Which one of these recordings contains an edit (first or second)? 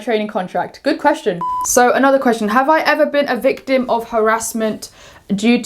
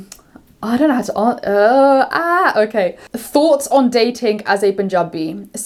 first